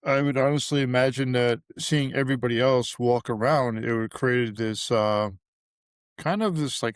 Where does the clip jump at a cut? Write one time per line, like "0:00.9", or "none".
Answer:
none